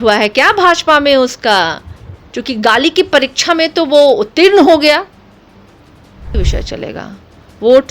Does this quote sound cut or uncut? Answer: cut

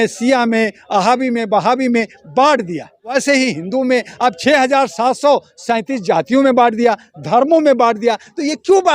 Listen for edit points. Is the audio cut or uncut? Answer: cut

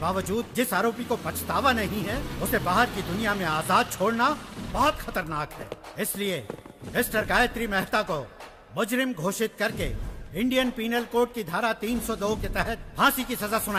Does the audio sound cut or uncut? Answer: uncut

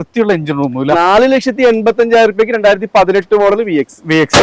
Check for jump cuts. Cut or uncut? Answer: uncut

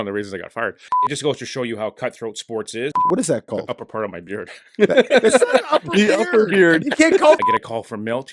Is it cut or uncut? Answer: cut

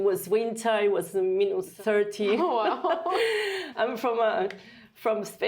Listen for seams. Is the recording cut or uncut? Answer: cut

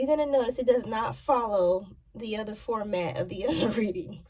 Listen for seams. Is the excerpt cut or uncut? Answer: uncut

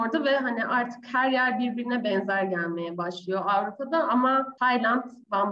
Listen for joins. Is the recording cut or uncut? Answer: cut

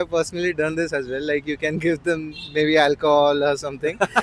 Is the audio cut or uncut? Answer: uncut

